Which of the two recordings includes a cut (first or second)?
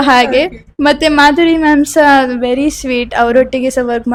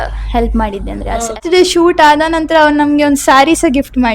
second